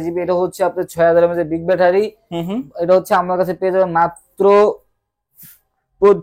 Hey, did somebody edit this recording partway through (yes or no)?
no